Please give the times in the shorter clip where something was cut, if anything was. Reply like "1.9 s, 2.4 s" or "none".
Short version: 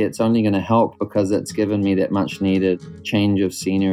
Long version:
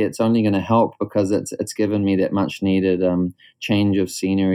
1.5 s, 2.8 s